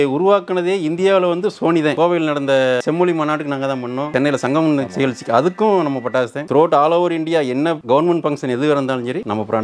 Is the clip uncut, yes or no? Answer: no